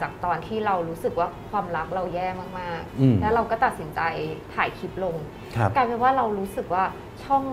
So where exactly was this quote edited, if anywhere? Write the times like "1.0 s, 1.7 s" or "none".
none